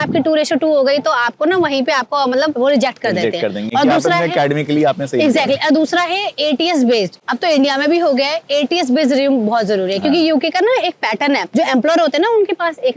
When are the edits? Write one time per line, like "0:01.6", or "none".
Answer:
none